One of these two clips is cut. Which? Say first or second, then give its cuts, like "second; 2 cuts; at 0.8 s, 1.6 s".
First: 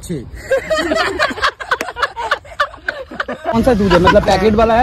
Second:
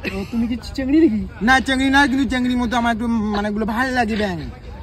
first; 1 cut; at 3.5 s